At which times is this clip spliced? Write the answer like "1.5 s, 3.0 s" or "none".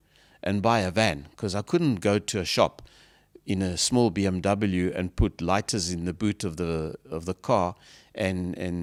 none